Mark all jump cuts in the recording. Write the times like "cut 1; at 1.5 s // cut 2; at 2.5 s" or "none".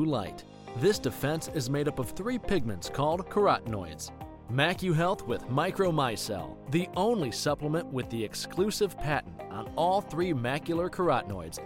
none